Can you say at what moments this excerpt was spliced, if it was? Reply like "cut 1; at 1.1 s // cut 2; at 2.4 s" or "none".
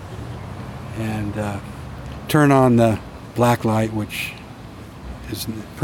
none